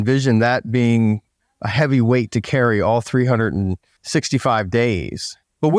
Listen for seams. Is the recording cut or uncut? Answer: uncut